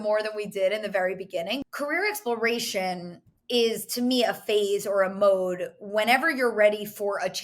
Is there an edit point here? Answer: yes; 1 cut; at 1.6 s

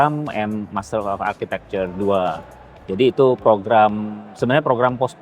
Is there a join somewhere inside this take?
no; 0 cuts

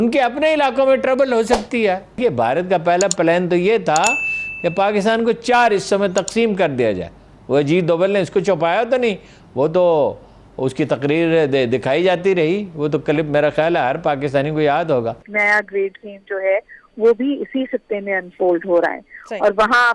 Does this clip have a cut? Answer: yes; 2 cuts; at 2.1 s, 15.2 s

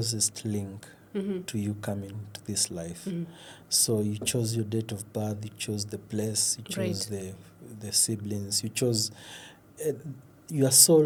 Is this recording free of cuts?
yes; 0 cuts

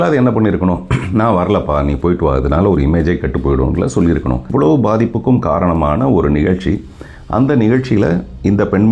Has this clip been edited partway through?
yes; 1 cut; at 4.5 s

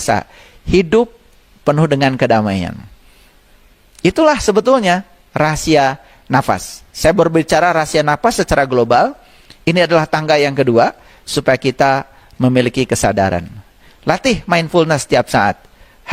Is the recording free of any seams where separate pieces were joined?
yes; 0 cuts

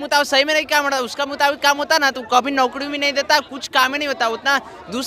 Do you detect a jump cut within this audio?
no; 0 cuts

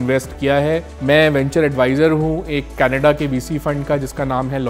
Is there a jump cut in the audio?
yes; 1 cut; at 0.9 s

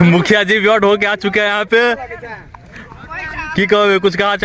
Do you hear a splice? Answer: no; 0 cuts

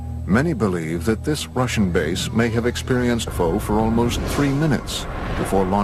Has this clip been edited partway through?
no; 0 cuts

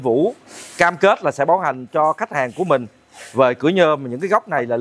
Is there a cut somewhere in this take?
no; 0 cuts

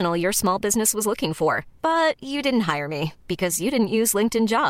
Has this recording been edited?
no; 0 cuts

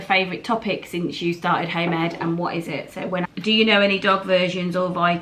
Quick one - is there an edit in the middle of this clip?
yes; 1 cut; at 3.2 s

